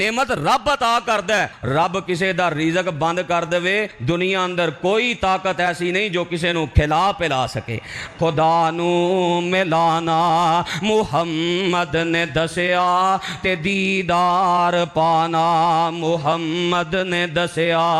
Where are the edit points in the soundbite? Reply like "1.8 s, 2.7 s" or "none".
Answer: 8.0 s